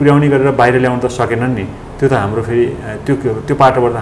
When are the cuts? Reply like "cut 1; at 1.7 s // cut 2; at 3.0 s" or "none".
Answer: none